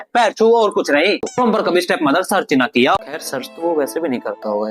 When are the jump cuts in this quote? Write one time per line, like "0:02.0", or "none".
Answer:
0:01.3
0:03.1